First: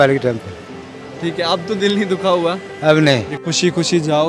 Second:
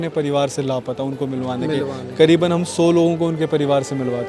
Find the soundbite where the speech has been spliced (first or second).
first